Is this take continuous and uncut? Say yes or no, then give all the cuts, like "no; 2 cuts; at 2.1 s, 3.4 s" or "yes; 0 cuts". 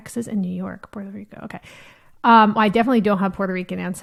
yes; 0 cuts